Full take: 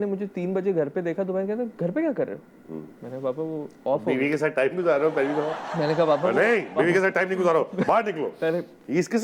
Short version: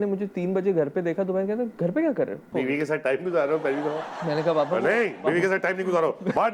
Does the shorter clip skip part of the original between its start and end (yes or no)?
yes